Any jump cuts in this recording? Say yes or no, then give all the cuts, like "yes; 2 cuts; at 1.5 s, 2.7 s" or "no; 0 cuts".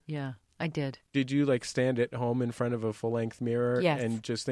yes; 1 cut; at 1.1 s